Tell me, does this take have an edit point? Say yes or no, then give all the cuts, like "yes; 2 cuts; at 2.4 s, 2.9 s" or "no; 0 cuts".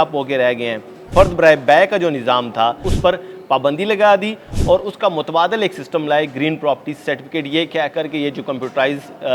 yes; 2 cuts; at 1.0 s, 2.9 s